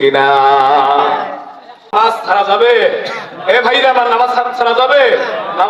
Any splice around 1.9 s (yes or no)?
yes